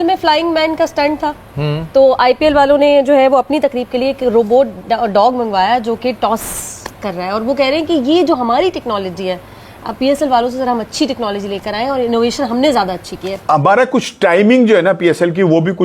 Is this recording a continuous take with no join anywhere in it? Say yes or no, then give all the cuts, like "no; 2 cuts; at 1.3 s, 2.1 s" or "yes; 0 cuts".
no; 1 cut; at 13.3 s